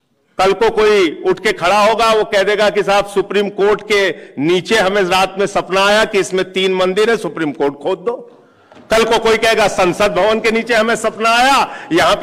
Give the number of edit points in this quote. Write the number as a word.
zero